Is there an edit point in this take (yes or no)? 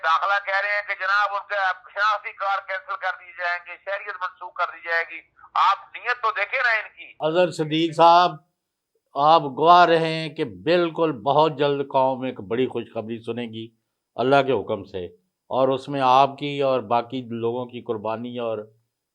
yes